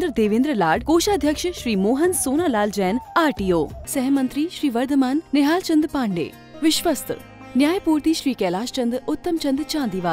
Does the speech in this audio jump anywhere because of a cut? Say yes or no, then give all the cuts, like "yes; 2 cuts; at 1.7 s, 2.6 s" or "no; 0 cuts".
no; 0 cuts